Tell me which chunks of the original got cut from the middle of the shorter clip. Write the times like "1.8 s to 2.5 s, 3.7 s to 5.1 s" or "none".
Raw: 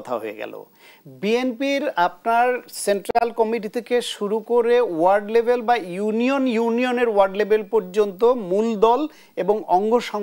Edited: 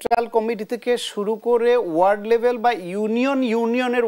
none